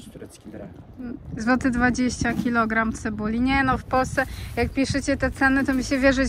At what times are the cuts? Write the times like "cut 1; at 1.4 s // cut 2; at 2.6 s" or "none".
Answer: none